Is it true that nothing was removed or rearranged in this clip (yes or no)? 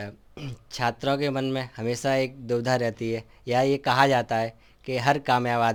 yes